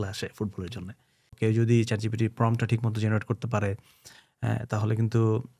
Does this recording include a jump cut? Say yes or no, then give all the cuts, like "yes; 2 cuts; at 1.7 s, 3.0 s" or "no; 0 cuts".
yes; 1 cut; at 1.3 s